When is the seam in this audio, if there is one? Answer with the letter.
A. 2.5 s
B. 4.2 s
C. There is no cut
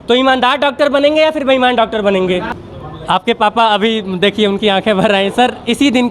A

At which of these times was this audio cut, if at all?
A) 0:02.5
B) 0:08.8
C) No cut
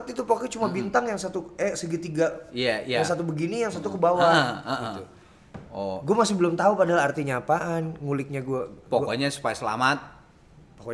C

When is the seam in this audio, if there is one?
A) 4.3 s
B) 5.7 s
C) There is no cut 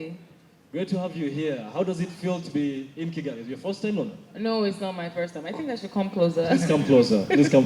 C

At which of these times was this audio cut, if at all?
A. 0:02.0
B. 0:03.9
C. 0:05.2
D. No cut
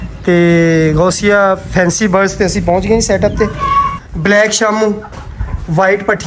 B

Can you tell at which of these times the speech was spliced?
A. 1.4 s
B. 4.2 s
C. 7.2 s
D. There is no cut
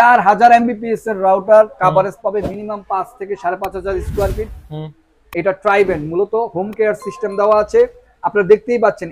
D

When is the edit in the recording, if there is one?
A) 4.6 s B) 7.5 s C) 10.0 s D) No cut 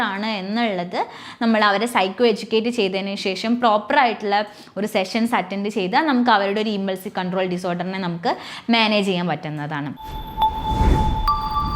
C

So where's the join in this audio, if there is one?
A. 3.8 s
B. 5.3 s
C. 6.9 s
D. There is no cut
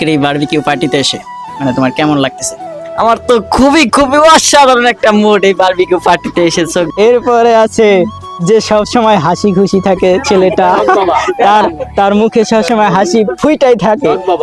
C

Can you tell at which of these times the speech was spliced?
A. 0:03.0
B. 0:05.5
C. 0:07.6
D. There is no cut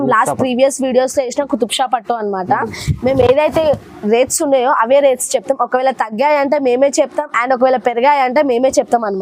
D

